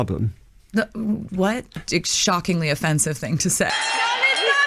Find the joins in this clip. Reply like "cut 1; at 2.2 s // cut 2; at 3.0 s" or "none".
cut 1; at 1.8 s // cut 2; at 3.7 s

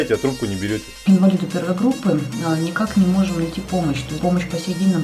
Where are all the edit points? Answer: cut 1; at 0.9 s // cut 2; at 4.2 s

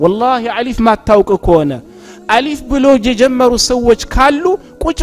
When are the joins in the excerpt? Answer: none

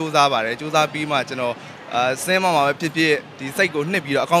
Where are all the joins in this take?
none

